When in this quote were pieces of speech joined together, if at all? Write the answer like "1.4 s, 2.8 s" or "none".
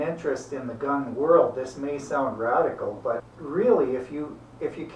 3.3 s

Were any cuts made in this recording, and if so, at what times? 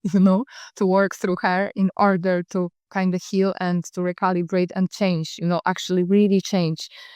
2.8 s

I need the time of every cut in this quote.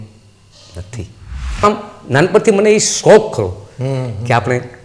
1.6 s

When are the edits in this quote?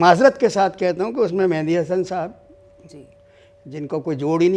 none

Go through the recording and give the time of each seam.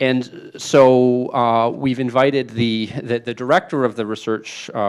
none

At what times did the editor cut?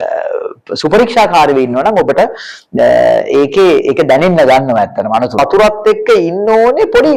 5.4 s

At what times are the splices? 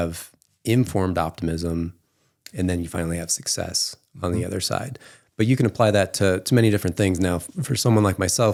none

